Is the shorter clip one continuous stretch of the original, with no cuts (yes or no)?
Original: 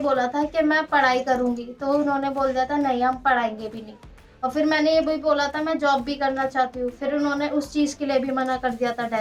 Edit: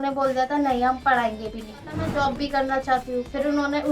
no